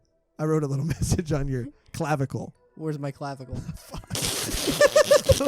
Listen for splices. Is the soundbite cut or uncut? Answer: cut